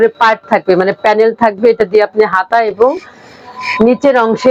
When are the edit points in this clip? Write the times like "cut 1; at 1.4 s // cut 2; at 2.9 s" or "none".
none